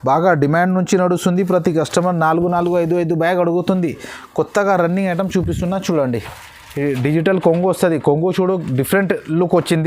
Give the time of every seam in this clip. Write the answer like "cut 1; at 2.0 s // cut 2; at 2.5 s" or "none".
none